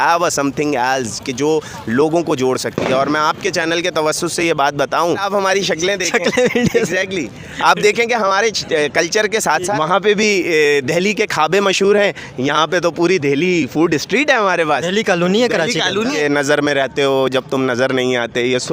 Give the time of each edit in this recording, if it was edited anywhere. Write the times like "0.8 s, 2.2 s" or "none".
5.3 s, 9.7 s, 16.1 s